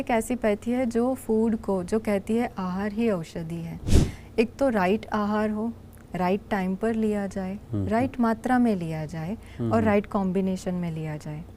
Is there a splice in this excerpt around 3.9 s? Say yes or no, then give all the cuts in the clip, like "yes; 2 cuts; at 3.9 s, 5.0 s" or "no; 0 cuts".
yes; 1 cut; at 3.9 s